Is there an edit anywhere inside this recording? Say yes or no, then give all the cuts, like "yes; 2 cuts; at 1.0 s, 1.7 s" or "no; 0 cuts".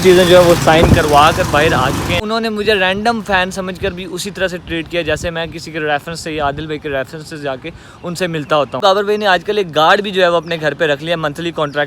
yes; 2 cuts; at 2.2 s, 8.8 s